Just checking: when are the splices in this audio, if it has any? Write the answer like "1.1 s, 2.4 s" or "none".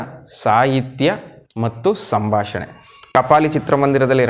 3.1 s